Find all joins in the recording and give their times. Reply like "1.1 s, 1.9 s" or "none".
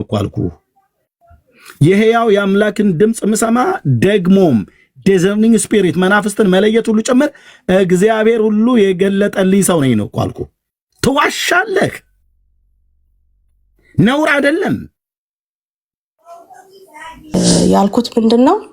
17.3 s